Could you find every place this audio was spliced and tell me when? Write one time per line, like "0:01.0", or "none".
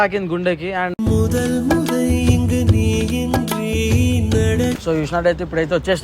0:04.8